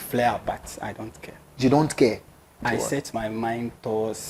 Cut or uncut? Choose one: cut